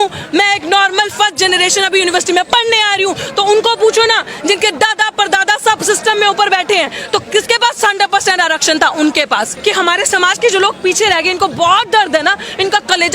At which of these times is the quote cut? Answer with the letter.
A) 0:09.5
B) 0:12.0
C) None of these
A